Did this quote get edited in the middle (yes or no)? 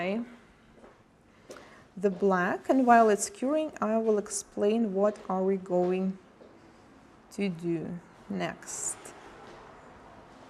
no